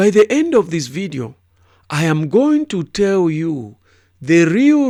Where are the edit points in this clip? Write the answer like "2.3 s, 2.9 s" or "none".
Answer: none